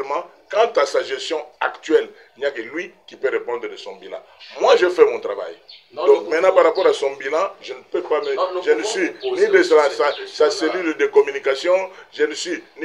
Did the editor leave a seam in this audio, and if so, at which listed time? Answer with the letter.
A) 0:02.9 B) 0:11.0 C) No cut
C